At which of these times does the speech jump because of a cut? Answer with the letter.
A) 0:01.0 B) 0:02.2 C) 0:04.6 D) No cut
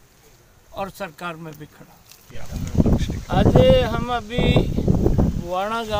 B